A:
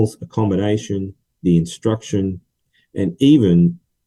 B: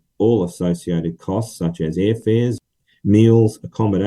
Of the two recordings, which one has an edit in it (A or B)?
B